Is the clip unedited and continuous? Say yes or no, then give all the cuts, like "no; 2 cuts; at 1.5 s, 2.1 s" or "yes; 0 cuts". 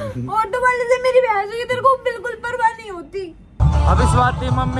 no; 1 cut; at 3.6 s